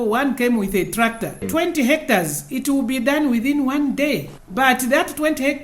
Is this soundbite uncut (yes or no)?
no